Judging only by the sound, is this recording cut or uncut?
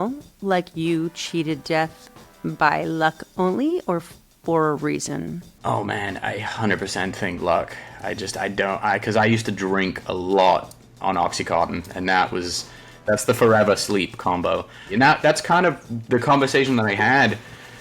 cut